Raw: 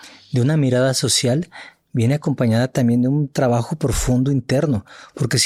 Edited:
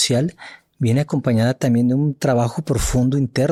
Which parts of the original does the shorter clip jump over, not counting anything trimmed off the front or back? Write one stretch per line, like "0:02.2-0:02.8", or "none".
none

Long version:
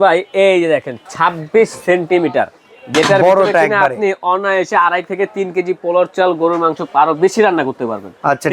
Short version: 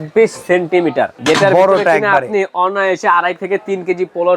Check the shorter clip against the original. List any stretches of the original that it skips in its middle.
0:02.5-0:02.8

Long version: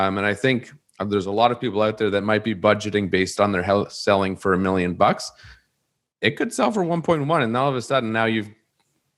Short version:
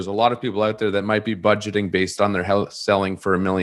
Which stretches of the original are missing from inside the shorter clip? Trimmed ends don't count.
none

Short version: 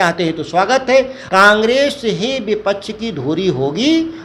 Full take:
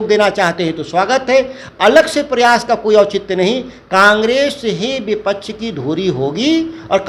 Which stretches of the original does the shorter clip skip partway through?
0:01.6-0:03.8

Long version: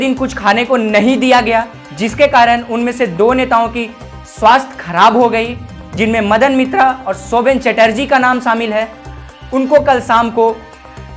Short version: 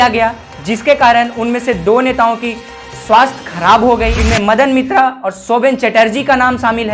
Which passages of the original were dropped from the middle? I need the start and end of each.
0:05.5-0:06.0

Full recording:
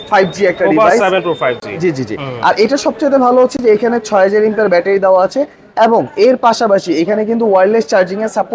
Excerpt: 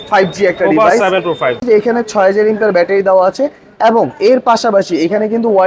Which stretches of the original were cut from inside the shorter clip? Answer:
0:01.6-0:03.6

